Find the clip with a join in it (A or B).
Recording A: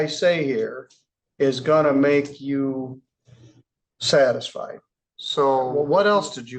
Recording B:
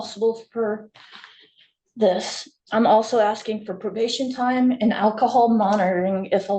A